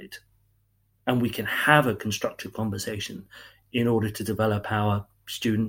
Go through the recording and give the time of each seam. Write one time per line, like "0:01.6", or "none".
none